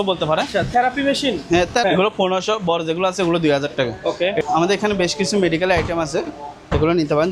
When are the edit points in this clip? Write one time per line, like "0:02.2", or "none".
0:01.8
0:04.4

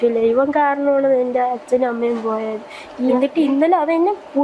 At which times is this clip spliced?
0:03.1

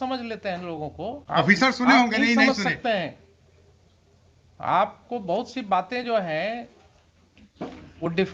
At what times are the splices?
0:01.2

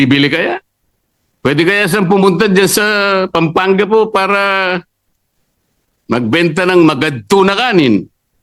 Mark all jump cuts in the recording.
none

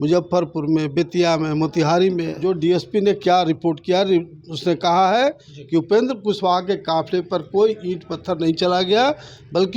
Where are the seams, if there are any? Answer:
0:02.3

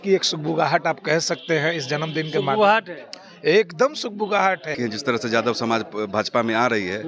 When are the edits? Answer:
0:04.7

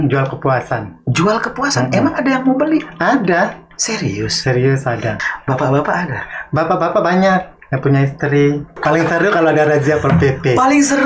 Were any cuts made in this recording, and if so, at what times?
0:05.3
0:08.7

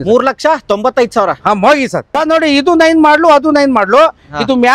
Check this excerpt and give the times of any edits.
0:02.1

